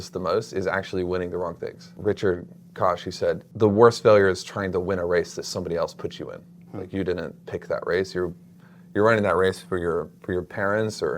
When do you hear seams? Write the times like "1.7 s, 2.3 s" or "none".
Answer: 1.9 s, 3.5 s